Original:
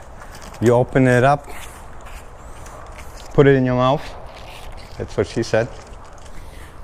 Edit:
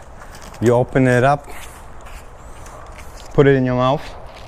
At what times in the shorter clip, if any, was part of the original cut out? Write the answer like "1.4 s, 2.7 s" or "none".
none